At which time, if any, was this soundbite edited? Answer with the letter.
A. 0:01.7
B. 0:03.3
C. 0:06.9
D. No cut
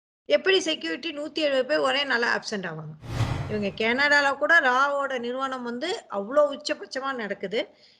B